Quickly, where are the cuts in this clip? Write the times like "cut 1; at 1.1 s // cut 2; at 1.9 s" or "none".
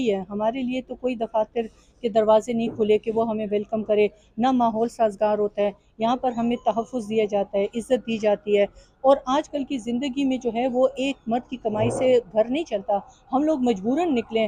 none